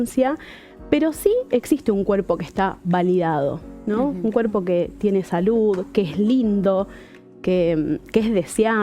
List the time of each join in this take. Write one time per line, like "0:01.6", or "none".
none